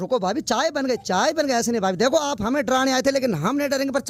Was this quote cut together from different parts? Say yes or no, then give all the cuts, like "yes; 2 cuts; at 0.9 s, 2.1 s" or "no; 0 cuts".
no; 0 cuts